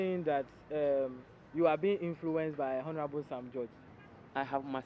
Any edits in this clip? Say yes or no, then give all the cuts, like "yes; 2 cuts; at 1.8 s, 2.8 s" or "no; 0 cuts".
yes; 1 cut; at 3.8 s